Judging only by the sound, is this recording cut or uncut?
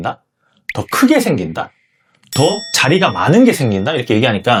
uncut